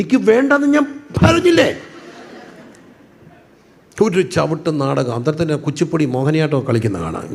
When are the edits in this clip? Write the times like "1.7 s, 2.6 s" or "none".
none